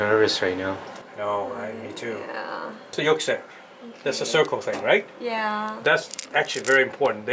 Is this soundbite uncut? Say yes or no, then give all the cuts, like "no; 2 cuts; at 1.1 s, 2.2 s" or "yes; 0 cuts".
no; 1 cut; at 2.9 s